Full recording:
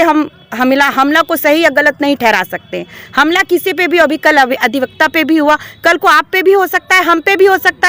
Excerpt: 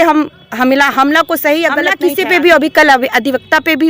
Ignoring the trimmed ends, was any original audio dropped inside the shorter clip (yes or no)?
yes